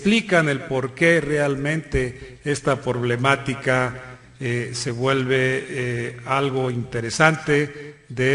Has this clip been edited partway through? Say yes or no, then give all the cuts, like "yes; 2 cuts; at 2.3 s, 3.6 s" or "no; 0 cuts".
no; 0 cuts